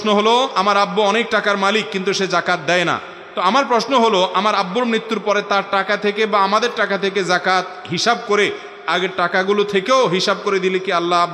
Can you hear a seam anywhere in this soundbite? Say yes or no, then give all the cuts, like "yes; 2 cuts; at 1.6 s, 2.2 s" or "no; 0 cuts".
no; 0 cuts